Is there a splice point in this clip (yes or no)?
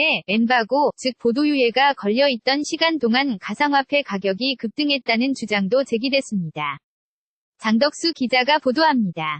no